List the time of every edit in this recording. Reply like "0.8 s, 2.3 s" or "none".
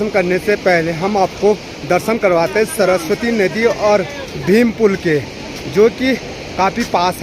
none